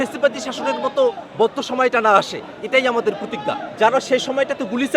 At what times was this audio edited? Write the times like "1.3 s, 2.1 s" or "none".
3.7 s